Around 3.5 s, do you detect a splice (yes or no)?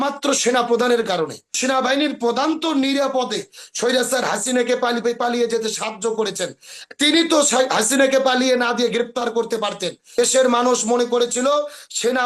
no